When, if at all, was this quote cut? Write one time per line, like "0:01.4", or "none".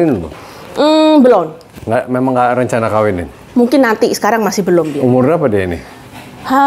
none